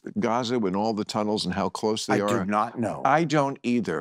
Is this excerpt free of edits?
yes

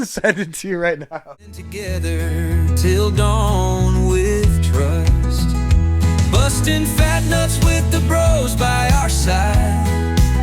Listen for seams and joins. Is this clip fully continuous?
no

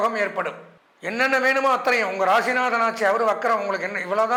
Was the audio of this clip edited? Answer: no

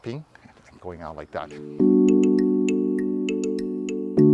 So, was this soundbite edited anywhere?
yes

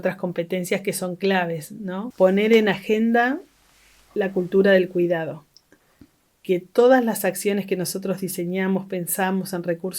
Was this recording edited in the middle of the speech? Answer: yes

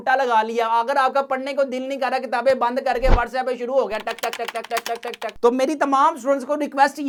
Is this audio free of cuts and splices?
yes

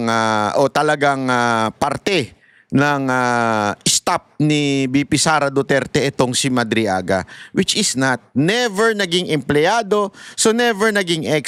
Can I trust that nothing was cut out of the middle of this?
yes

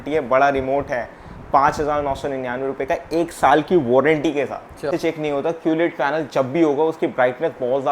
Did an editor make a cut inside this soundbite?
yes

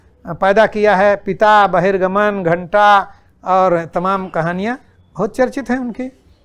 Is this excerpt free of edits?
yes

